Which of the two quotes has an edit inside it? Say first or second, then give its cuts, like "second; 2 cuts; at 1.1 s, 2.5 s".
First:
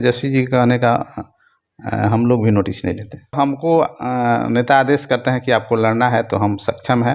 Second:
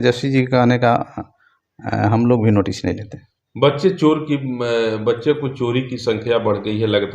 first; 1 cut; at 3.4 s